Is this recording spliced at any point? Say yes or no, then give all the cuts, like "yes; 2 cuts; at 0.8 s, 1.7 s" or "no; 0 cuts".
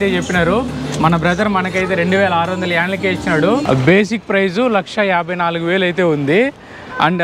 yes; 1 cut; at 3.6 s